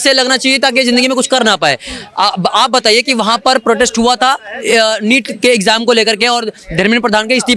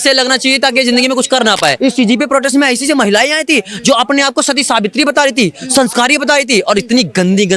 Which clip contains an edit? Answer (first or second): second